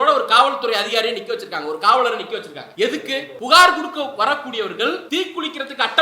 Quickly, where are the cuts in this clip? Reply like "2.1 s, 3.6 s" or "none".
2.6 s, 3.3 s, 5.0 s